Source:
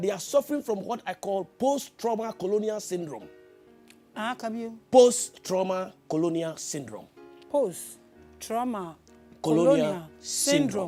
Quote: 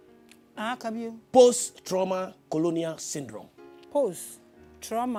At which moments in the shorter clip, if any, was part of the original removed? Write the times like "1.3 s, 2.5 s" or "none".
none